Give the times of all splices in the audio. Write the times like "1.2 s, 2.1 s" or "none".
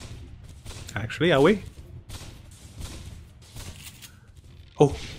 none